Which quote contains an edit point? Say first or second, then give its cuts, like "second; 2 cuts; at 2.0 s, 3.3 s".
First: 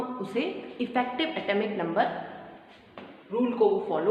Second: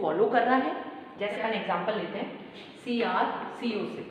second; 1 cut; at 1.4 s